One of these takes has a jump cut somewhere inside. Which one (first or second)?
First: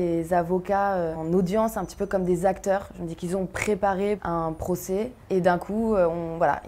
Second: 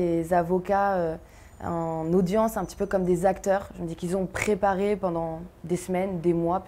first